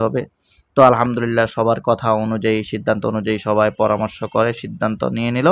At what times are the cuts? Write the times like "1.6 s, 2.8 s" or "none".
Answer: none